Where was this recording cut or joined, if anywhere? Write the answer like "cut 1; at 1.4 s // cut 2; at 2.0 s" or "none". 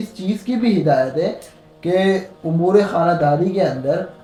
none